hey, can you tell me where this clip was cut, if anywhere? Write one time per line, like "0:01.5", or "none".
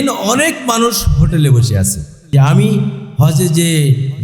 0:02.3